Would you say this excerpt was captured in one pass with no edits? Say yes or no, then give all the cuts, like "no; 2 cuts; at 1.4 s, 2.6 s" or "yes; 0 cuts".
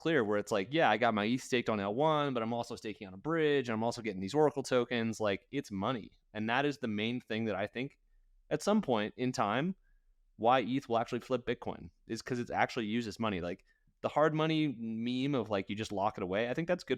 yes; 0 cuts